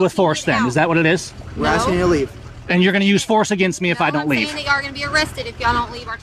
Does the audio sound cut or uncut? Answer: uncut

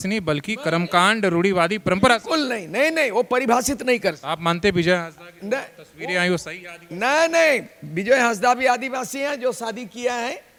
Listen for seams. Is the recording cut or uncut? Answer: uncut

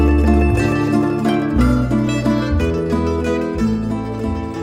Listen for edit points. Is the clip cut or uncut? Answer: cut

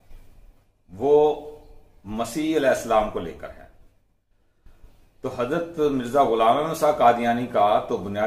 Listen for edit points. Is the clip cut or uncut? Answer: cut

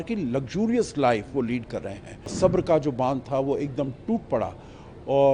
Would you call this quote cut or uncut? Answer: cut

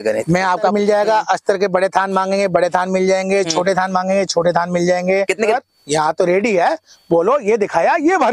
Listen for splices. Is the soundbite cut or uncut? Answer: cut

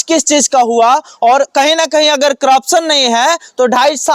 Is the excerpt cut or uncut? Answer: uncut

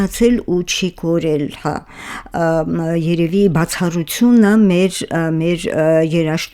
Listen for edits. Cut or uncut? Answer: uncut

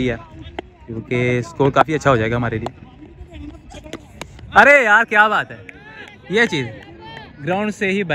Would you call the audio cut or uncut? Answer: uncut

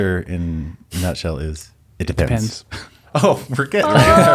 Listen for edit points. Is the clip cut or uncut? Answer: uncut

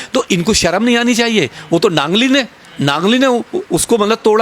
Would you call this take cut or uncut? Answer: uncut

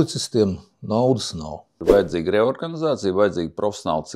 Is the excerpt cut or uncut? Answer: cut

